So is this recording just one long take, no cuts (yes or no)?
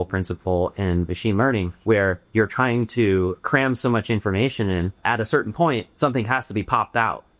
no